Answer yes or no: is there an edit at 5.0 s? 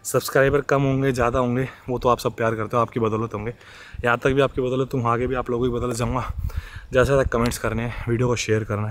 no